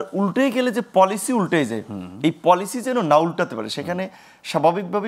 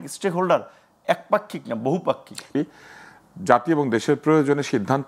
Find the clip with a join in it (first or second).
second